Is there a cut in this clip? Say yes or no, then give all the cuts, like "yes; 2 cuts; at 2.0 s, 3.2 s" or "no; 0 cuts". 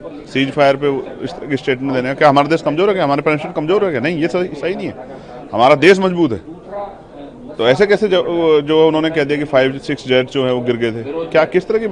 no; 0 cuts